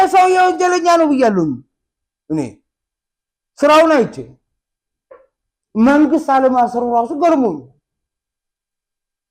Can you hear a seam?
no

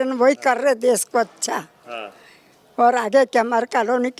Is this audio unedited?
yes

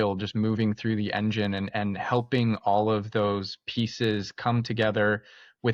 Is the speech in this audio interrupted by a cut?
no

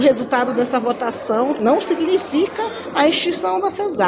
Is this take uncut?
no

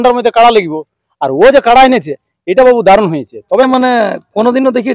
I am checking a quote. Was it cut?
yes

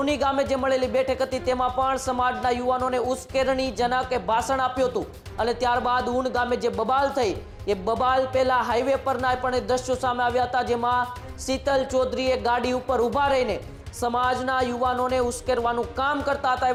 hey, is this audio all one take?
yes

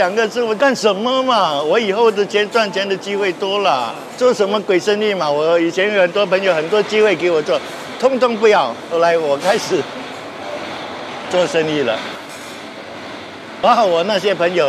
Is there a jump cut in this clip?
yes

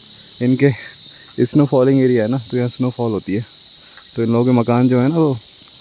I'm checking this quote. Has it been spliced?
no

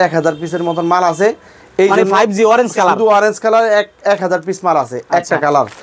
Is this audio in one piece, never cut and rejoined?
yes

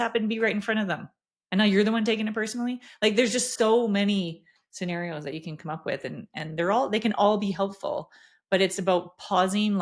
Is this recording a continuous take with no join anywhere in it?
yes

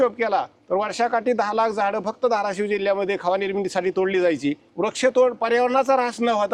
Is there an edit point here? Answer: yes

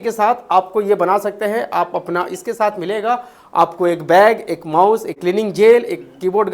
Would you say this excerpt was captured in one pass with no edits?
no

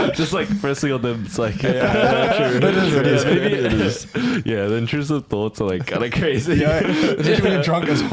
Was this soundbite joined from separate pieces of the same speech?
no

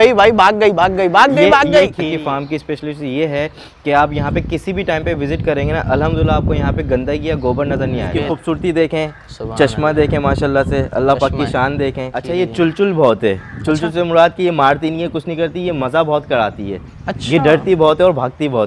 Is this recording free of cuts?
no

